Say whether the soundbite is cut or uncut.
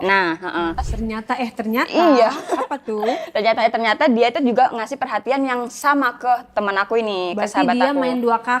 cut